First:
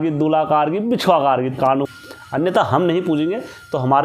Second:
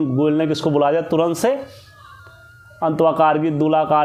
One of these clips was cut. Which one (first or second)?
first